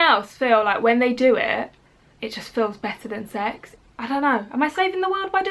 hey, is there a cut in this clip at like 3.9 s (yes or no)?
yes